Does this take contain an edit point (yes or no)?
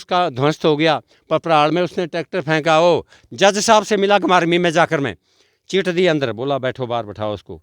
yes